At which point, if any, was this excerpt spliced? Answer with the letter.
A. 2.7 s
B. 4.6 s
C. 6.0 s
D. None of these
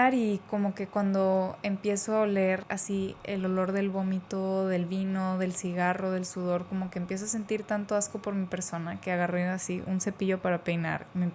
A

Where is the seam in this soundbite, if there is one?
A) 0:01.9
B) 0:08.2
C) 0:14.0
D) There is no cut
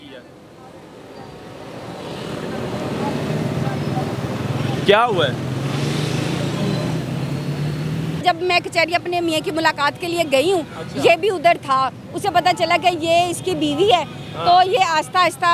B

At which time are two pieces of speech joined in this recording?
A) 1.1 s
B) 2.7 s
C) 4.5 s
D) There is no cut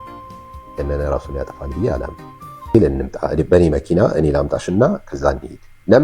B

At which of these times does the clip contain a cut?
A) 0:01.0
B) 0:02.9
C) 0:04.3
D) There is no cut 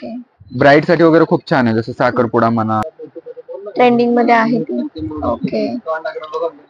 B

